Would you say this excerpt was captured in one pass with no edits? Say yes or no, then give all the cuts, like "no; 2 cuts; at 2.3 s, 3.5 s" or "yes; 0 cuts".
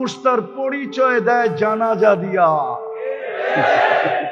yes; 0 cuts